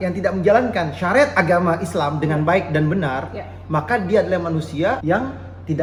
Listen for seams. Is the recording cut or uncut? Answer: uncut